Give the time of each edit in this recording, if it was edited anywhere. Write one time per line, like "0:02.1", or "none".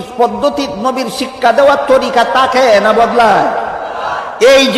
none